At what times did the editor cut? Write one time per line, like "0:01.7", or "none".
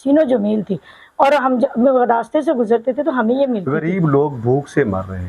0:03.7